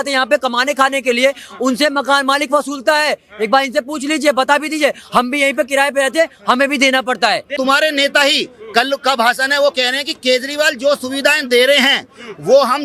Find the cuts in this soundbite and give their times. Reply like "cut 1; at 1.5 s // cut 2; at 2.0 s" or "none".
cut 1; at 7.5 s

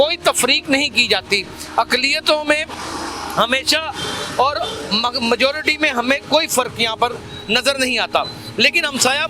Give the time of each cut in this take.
none

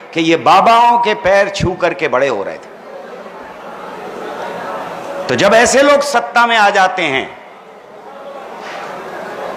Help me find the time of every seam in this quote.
none

